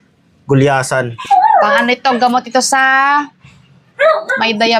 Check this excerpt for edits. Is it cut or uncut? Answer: cut